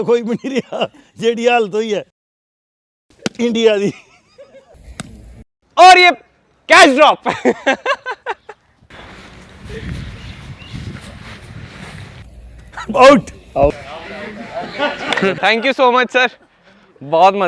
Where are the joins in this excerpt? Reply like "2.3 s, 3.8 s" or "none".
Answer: none